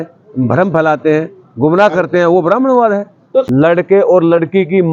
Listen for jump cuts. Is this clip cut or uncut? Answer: cut